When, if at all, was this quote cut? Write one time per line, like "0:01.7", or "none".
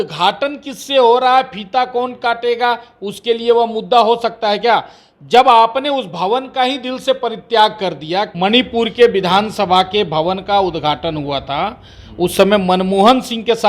0:08.3